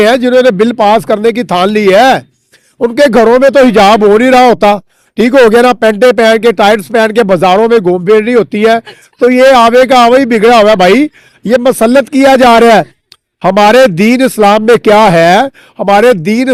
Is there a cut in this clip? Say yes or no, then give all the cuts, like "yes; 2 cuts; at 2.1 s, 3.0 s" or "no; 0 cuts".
no; 0 cuts